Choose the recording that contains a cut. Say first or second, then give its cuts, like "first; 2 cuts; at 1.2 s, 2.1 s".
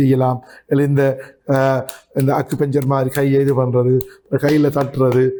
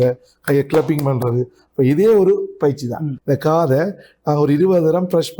second; 1 cut; at 3.1 s